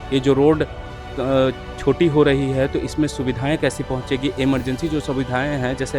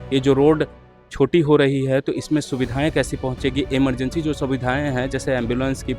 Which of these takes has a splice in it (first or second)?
second